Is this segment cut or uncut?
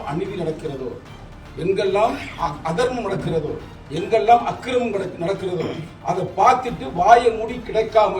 uncut